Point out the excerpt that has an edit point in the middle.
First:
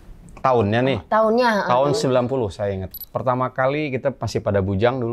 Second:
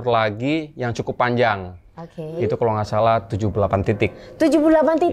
first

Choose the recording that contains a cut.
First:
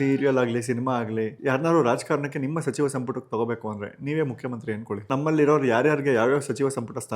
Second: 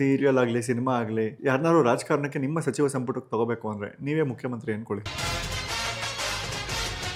first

